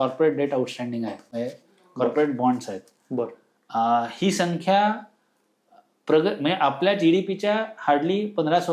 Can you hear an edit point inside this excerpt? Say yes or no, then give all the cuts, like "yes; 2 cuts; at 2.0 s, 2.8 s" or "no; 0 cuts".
no; 0 cuts